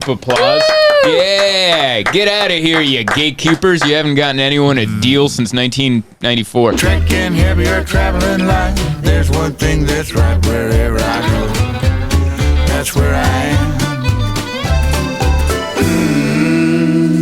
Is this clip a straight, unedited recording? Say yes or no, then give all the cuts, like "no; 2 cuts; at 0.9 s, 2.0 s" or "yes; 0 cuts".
no; 1 cut; at 6.8 s